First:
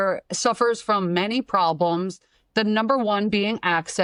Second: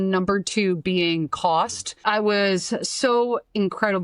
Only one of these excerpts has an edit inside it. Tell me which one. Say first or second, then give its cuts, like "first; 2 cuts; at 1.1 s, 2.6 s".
second; 1 cut; at 1.9 s